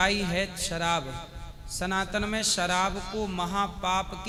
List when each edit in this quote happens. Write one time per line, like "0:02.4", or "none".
none